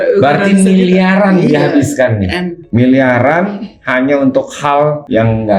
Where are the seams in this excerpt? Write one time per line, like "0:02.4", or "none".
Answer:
none